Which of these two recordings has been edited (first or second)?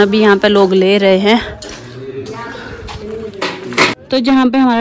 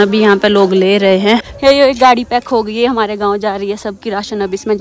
second